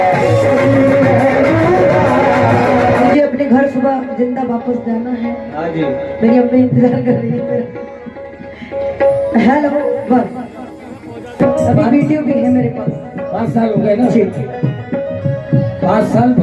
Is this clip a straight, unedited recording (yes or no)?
no